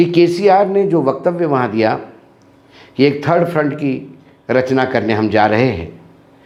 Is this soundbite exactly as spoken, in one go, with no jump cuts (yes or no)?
yes